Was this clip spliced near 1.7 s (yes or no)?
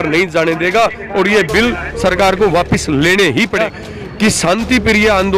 no